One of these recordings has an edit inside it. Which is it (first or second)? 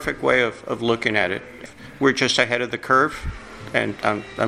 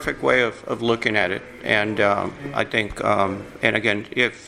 first